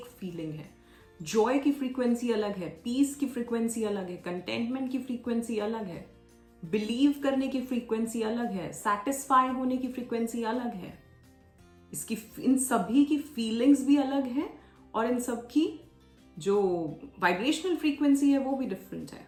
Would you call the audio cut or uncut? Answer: uncut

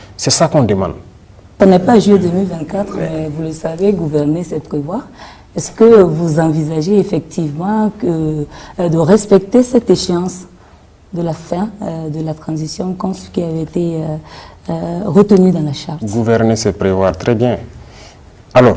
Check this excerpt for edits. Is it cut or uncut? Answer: cut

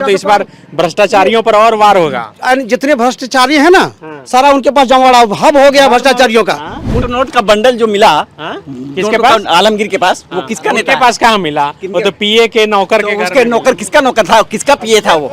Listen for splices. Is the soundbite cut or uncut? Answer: cut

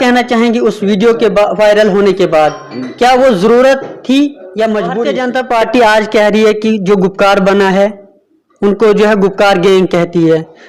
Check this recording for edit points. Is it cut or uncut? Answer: cut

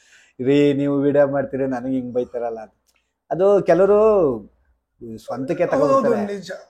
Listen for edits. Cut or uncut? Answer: uncut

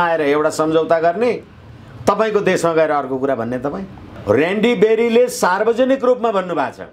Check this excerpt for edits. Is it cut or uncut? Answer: cut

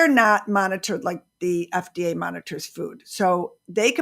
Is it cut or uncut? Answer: uncut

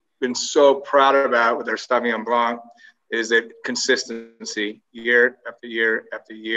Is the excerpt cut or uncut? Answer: uncut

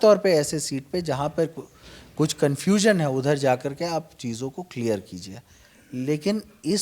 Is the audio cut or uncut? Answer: uncut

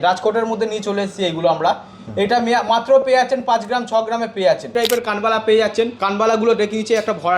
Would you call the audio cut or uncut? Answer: cut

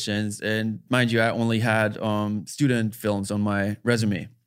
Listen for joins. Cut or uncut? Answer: uncut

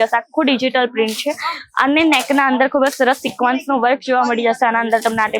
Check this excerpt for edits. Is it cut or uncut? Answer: uncut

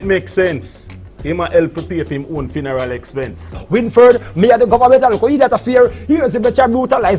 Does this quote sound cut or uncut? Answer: cut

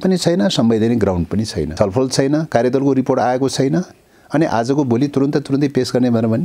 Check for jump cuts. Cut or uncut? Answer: cut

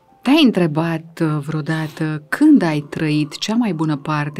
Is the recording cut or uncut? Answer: uncut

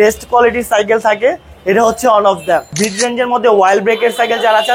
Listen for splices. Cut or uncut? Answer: cut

